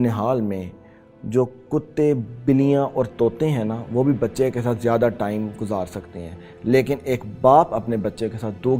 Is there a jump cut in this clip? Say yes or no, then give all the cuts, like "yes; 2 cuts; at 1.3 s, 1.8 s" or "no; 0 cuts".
no; 0 cuts